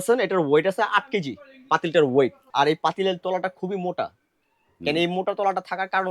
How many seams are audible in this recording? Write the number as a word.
one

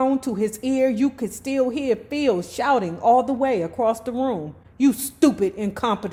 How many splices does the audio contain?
zero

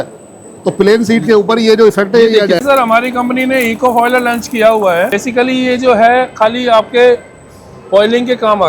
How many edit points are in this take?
two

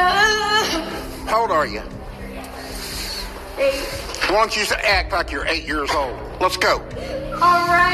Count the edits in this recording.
zero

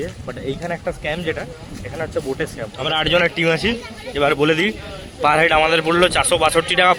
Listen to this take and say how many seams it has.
one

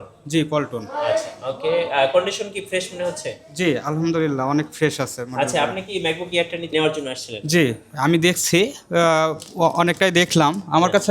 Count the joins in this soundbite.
one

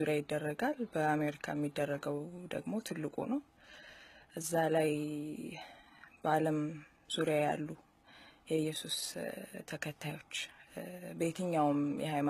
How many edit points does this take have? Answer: one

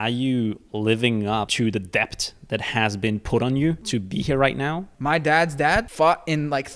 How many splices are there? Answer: four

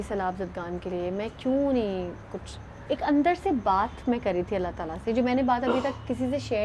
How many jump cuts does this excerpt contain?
zero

